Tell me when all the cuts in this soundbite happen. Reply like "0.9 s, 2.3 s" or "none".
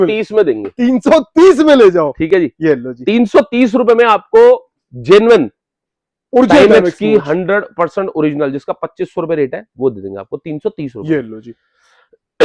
none